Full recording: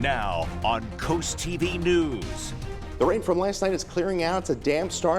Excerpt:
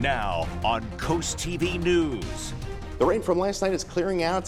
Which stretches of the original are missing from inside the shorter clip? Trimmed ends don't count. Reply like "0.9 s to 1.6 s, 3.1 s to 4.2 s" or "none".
none